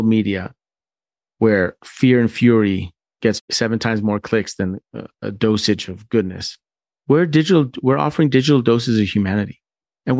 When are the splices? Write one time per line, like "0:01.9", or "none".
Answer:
0:03.5